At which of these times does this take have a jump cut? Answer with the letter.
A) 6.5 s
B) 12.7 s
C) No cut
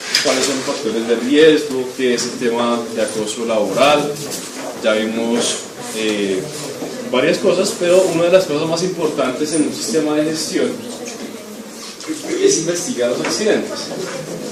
C